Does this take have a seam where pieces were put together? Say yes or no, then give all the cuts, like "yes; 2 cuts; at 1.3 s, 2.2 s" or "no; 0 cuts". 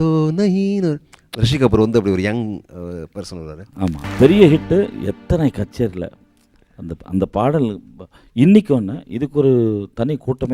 yes; 1 cut; at 4.1 s